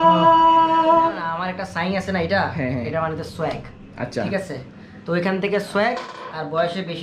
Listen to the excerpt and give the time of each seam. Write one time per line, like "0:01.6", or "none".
0:01.3